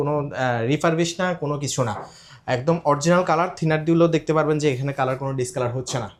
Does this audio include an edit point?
no; 0 cuts

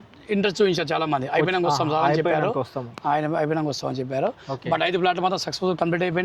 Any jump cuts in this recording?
no; 0 cuts

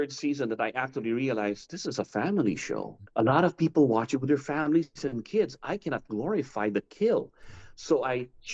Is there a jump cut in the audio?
yes; 1 cut; at 3.0 s

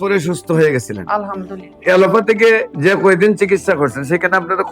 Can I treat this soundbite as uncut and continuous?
no; 1 cut; at 1.7 s

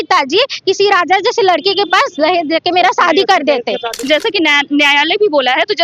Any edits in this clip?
yes; 1 cut; at 4.0 s

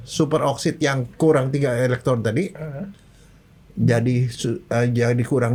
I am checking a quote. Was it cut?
no; 0 cuts

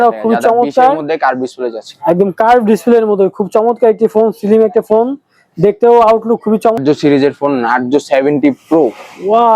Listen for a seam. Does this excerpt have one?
yes; 1 cut; at 6.8 s

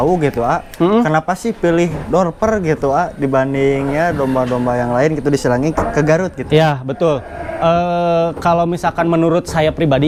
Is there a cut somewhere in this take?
no; 0 cuts

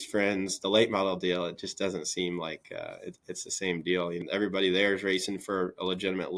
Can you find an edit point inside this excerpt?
yes; 1 cut; at 4.2 s

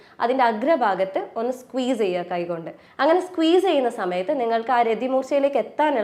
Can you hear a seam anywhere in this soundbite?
no; 0 cuts

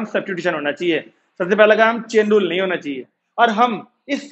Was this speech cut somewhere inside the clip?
yes; 1 cut; at 2.9 s

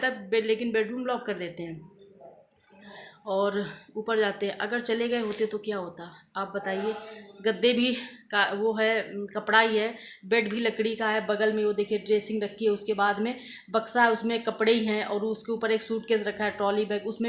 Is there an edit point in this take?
no; 0 cuts

